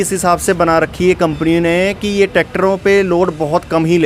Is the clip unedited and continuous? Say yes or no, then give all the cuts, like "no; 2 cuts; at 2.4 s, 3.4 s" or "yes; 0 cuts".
yes; 0 cuts